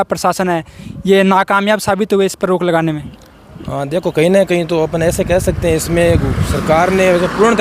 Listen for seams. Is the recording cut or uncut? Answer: uncut